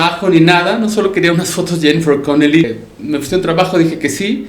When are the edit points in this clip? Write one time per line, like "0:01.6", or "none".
0:02.7